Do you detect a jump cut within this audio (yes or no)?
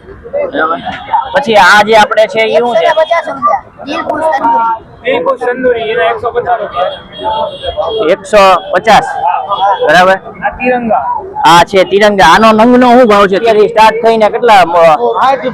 yes